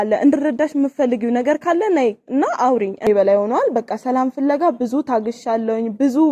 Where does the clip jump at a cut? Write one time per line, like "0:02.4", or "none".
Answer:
0:03.1